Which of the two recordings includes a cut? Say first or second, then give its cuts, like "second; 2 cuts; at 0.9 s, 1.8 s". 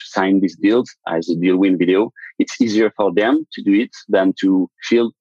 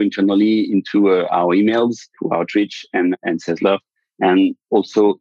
second; 2 cuts; at 2.1 s, 3.2 s